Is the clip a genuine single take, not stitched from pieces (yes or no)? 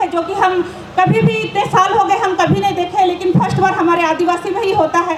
yes